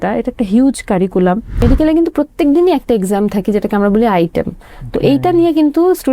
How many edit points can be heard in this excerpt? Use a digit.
1